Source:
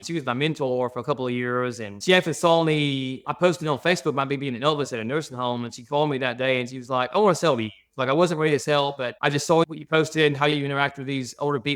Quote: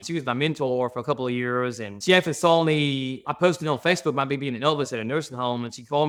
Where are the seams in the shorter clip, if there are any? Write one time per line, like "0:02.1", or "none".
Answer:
none